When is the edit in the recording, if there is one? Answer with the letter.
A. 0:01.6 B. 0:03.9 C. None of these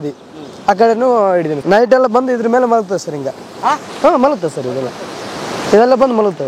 A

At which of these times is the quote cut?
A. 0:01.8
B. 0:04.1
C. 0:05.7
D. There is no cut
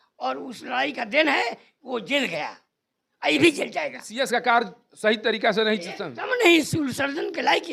B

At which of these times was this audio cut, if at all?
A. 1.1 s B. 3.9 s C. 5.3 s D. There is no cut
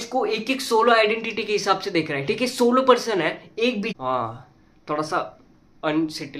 B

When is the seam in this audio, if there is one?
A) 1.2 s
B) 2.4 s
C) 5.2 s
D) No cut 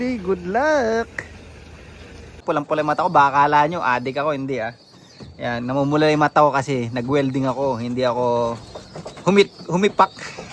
B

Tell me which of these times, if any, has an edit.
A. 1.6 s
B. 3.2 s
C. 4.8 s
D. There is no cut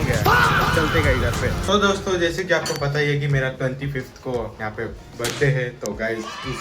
A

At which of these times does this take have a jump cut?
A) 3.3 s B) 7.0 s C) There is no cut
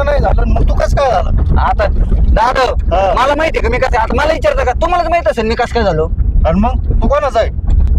C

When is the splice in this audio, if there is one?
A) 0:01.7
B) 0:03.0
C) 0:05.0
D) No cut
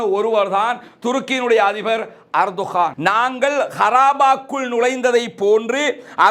B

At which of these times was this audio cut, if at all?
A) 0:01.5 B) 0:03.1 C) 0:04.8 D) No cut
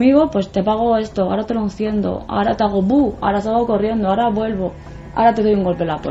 D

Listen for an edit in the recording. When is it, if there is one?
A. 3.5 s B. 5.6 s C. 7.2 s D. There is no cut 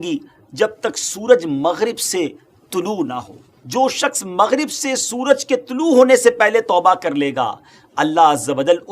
A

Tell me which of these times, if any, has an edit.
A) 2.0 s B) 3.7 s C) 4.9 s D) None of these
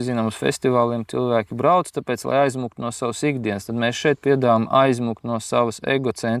D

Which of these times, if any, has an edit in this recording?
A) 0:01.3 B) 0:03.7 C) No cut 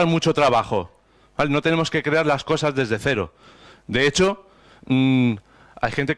A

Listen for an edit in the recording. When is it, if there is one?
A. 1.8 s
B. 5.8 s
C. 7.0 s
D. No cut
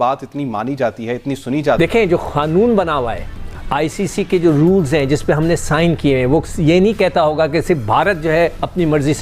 A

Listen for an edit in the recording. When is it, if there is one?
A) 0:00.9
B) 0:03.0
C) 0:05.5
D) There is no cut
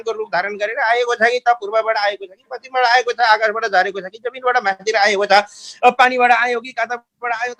D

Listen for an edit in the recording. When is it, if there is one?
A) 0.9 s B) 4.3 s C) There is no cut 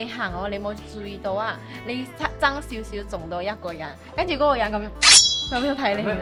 C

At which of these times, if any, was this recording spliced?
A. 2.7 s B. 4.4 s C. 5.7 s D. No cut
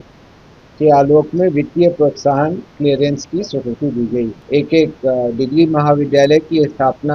B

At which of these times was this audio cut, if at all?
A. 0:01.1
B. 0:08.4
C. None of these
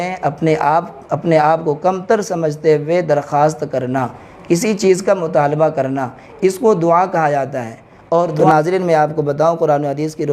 B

